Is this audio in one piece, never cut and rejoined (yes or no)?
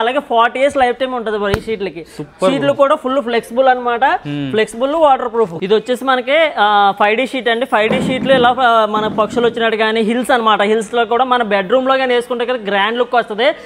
yes